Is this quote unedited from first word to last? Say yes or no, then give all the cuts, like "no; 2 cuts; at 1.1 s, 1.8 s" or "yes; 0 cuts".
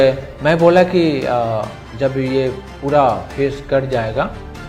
yes; 0 cuts